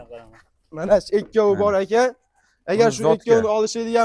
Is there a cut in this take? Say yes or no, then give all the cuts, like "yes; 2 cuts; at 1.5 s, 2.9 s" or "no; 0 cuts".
no; 0 cuts